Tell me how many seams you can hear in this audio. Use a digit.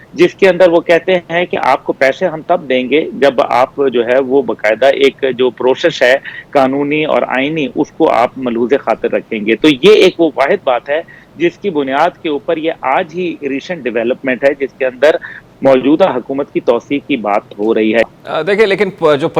0